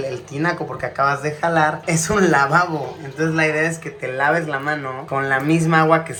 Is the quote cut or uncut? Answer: uncut